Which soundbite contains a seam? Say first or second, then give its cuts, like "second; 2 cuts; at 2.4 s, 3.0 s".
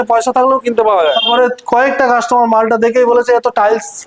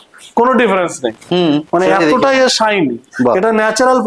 first; 1 cut; at 1.3 s